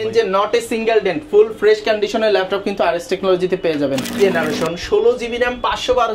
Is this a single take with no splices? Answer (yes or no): no